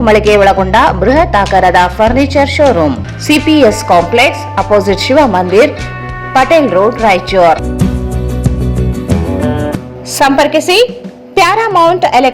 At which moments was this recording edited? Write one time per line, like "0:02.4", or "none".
0:02.9